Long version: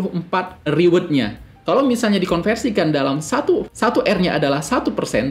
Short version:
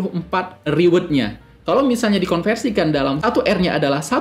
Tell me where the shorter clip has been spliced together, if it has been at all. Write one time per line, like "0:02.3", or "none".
0:03.2